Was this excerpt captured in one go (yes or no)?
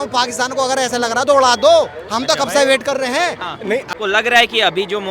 no